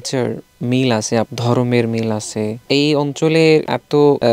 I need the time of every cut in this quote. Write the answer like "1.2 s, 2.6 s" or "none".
1.3 s, 2.6 s